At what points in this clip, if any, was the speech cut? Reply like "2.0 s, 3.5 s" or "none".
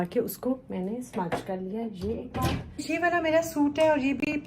2.8 s